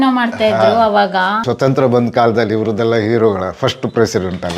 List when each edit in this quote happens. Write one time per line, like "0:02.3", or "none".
0:01.4